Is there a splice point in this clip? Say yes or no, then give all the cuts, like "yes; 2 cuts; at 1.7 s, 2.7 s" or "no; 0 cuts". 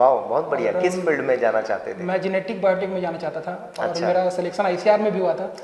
no; 0 cuts